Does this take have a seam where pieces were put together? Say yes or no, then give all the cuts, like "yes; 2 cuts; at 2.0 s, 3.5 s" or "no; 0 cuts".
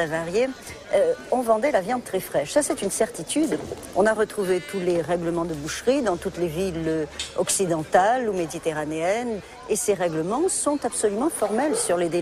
no; 0 cuts